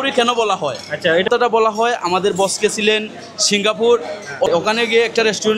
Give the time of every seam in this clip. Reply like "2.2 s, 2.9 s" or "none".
1.3 s, 4.6 s

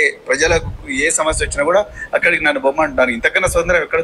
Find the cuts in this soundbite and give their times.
none

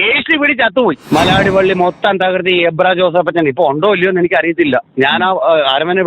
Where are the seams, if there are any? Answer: 1.0 s

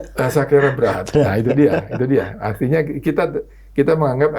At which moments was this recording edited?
none

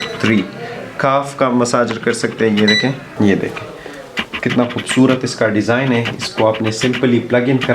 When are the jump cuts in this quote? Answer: 3.2 s

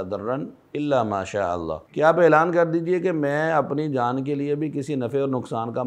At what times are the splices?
1.8 s

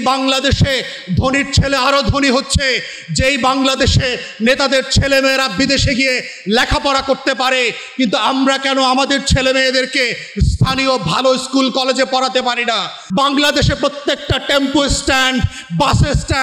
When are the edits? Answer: 13.0 s

